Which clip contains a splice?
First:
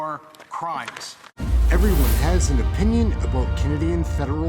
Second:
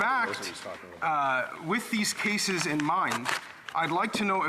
first; 1 cut; at 1.4 s

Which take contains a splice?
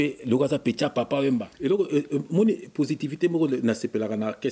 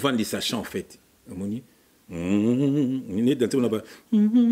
first; 1 cut; at 1.5 s

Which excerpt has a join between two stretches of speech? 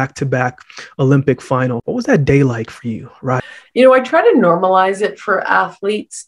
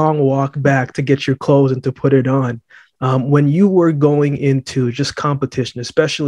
first; 2 cuts; at 1.8 s, 3.4 s

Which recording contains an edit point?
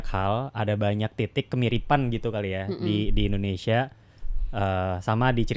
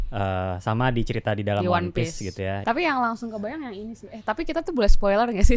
second; 1 cut; at 2.6 s

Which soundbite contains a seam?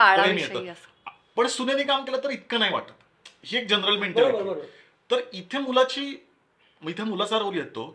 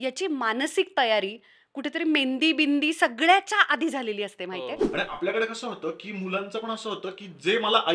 second; 1 cut; at 4.8 s

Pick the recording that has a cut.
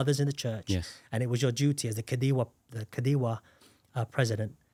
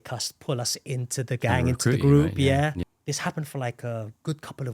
second; 1 cut; at 2.9 s

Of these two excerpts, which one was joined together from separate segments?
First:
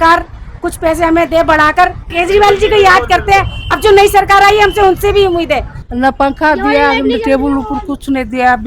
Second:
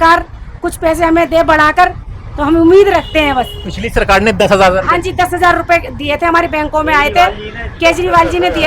first; 2 cuts; at 2.1 s, 5.7 s

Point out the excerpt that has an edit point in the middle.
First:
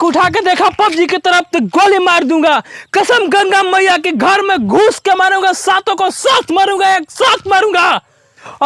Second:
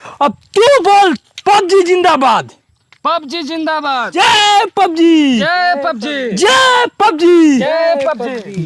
second; 1 cut; at 4.0 s

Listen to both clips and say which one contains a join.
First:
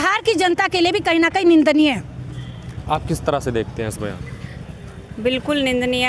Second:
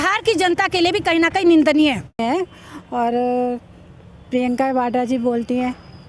second; 1 cut; at 2.2 s

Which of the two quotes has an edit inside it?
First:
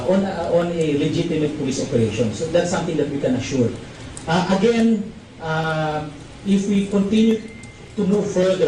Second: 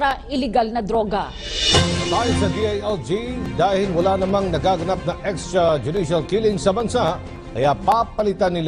second; 1 cut; at 3.9 s

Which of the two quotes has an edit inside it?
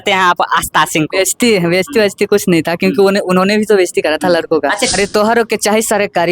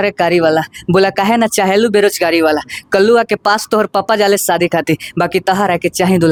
first; 1 cut; at 4.9 s

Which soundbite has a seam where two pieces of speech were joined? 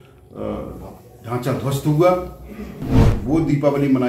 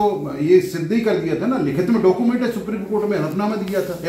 first; 1 cut; at 3.2 s

